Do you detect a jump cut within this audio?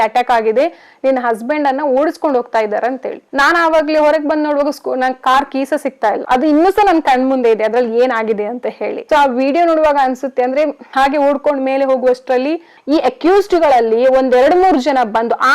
yes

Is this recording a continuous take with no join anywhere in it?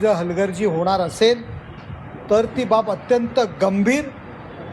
yes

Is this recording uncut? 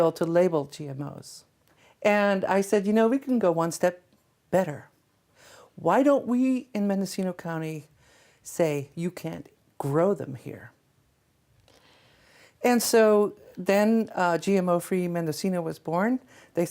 no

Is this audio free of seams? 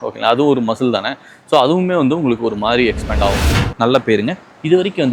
no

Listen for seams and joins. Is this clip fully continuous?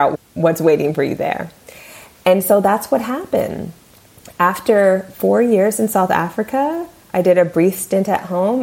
yes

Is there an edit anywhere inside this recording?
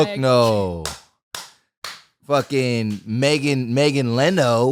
no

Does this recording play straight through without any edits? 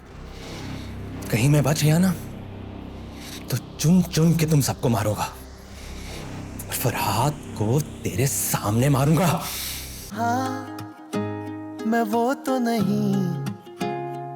no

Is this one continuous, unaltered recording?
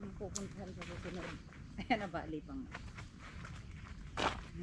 yes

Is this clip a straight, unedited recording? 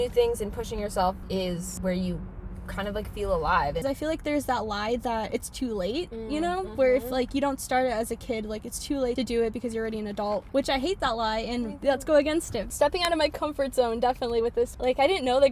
no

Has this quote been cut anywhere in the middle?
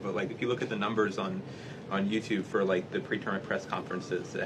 no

